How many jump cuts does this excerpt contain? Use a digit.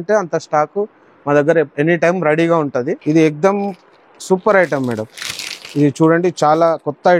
1